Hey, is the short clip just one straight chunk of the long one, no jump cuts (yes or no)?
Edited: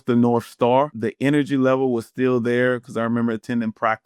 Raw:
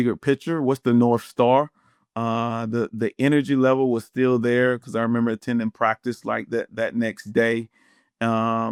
no